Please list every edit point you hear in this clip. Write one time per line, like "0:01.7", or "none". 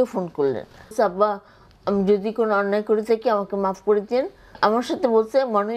0:00.9
0:04.5